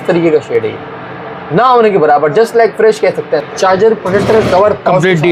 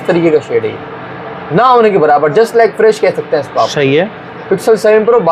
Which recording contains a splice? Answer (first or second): first